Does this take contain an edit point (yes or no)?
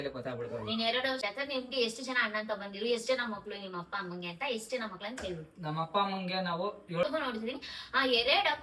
yes